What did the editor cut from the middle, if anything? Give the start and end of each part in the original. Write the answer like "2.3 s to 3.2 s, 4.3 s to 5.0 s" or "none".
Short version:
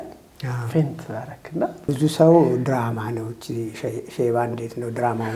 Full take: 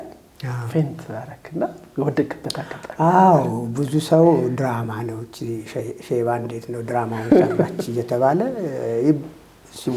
1.8 s to 3.7 s